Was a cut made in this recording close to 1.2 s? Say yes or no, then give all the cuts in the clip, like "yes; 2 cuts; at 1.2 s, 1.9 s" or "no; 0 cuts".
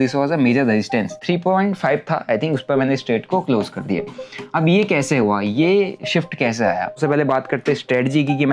yes; 2 cuts; at 1.2 s, 7.0 s